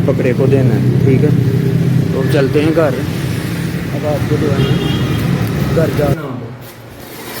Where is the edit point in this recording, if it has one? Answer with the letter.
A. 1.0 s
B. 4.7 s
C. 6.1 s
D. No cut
C